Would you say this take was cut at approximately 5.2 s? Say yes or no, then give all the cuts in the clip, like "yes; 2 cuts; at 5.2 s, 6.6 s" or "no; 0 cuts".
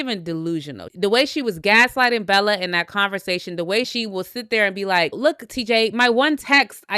yes; 3 cuts; at 0.8 s, 3.9 s, 5.2 s